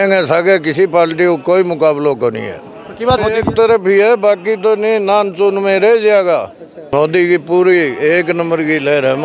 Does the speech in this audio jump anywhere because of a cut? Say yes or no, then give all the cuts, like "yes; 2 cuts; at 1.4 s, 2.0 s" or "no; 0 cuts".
yes; 2 cuts; at 3.2 s, 6.7 s